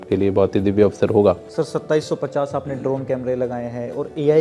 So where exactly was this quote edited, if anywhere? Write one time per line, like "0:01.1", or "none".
0:01.5